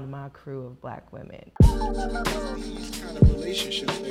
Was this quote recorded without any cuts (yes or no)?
no